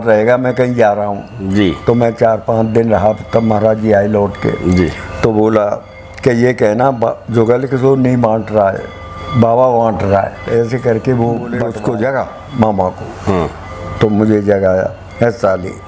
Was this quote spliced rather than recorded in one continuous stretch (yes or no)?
yes